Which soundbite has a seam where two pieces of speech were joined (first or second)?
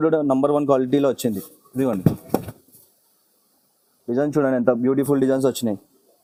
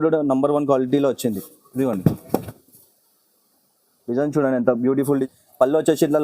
second